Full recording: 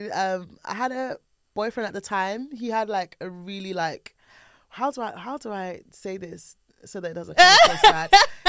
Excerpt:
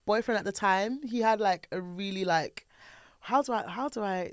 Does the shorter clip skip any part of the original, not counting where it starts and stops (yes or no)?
no